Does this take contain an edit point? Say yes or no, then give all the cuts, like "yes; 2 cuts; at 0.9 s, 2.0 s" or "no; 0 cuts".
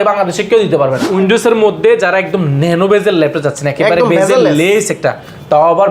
yes; 1 cut; at 1.1 s